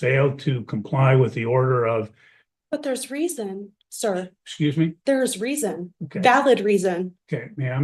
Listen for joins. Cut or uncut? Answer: uncut